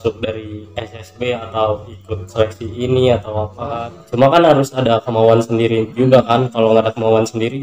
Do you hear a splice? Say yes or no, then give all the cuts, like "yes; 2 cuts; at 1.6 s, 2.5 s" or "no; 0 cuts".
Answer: yes; 1 cut; at 3.7 s